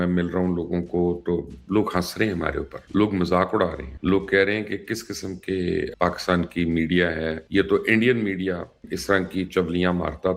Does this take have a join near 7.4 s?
yes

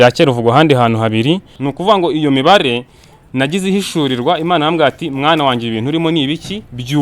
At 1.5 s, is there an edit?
yes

